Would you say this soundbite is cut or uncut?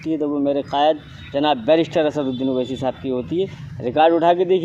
uncut